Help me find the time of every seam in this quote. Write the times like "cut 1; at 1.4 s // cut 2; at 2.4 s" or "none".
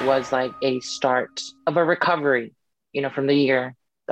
cut 1; at 1.4 s